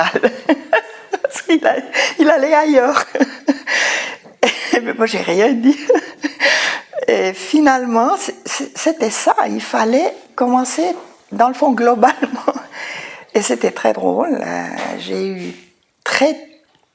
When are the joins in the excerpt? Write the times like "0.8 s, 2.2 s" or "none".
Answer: 4.7 s